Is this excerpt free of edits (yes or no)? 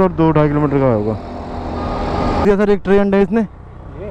no